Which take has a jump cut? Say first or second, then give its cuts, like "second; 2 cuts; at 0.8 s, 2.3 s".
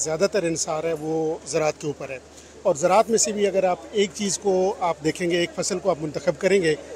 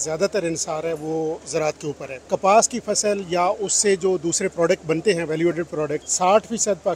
second; 2 cuts; at 2.1 s, 6.0 s